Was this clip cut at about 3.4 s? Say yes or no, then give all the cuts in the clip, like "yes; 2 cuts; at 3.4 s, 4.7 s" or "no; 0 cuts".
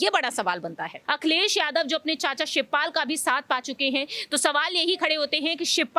no; 1 cut; at 1.0 s